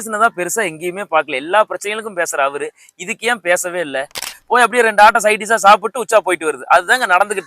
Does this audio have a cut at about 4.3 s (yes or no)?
yes